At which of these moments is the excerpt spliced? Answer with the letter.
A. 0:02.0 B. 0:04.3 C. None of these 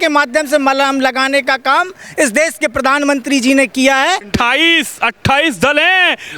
B